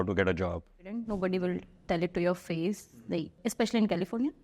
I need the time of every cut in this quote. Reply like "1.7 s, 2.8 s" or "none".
0.9 s, 3.3 s